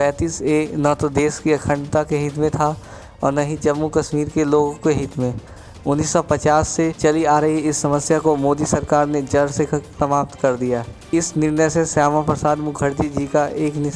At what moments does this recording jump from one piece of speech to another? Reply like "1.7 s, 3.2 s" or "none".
7.0 s, 9.9 s, 11.0 s

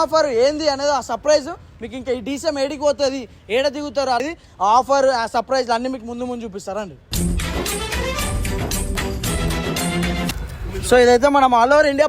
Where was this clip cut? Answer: 4.2 s, 10.3 s

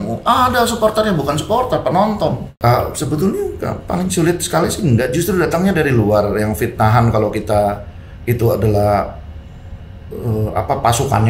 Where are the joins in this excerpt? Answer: 2.5 s

